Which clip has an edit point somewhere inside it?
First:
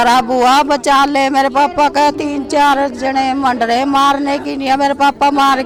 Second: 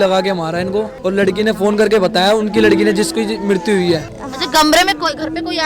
second; 1 cut; at 4.2 s

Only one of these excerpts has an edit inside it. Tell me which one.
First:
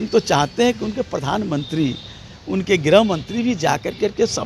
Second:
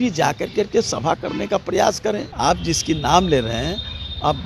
second; 1 cut; at 2.3 s

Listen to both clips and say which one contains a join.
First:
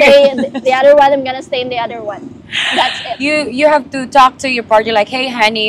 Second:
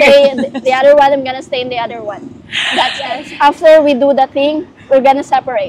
second; 1 cut; at 3.2 s

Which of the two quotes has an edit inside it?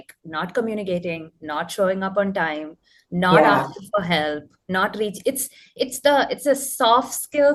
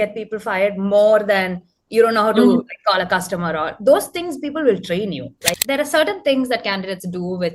second; 1 cut; at 5.6 s

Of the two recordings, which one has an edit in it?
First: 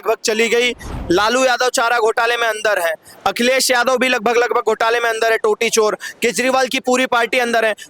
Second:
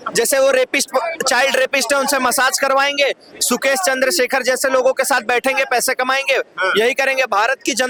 first; 1 cut; at 0.9 s

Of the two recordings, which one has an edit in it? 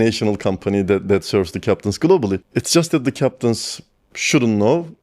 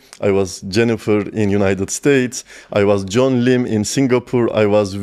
first; 1 cut; at 2.4 s

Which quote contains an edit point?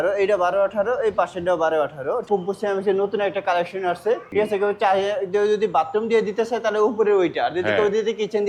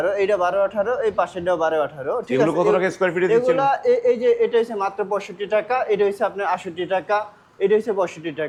first; 2 cuts; at 2.2 s, 4.3 s

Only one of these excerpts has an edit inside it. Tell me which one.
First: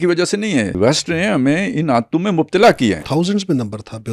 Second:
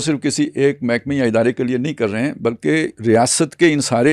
first; 2 cuts; at 0.8 s, 3.0 s

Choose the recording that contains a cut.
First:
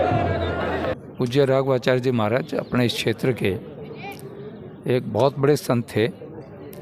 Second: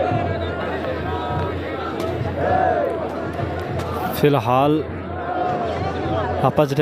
first; 1 cut; at 1.0 s

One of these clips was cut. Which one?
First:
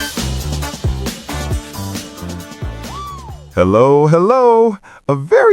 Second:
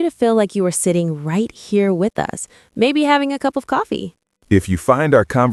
first; 1 cut; at 3.4 s

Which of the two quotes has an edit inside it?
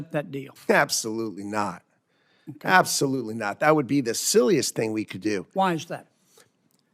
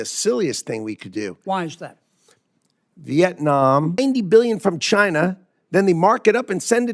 second; 1 cut; at 4.0 s

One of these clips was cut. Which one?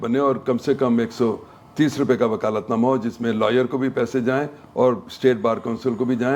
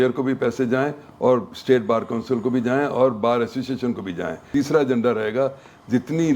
second; 1 cut; at 4.5 s

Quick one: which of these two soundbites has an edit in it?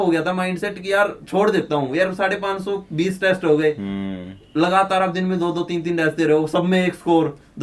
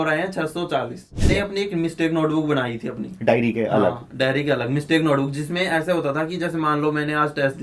second; 1 cut; at 1.3 s

